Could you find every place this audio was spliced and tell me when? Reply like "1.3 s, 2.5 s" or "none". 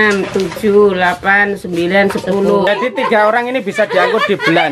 2.7 s